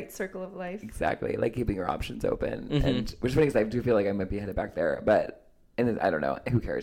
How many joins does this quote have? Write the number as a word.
zero